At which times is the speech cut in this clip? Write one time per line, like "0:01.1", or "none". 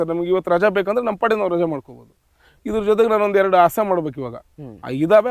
none